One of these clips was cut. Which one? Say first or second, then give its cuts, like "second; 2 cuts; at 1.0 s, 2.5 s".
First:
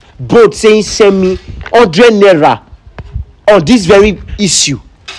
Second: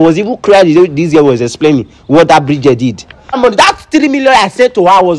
second; 1 cut; at 3.4 s